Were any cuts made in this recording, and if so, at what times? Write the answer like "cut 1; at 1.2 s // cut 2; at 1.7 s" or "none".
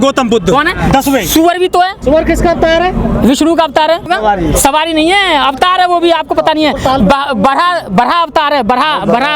cut 1; at 2.0 s // cut 2; at 4.0 s